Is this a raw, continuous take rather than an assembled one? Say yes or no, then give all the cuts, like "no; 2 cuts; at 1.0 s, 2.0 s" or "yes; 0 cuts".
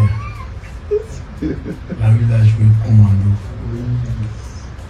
yes; 0 cuts